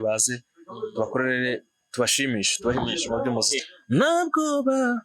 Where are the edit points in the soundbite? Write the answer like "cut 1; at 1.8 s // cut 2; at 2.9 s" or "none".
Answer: cut 1; at 3.6 s